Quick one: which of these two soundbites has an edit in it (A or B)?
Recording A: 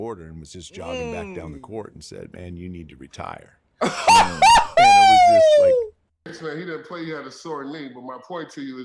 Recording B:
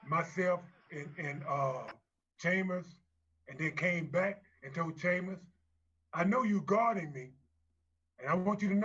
A